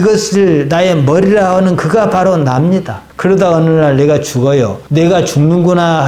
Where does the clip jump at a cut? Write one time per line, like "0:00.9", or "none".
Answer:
none